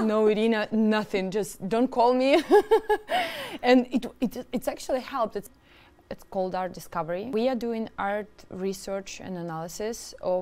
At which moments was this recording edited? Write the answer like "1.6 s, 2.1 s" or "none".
5.5 s, 7.3 s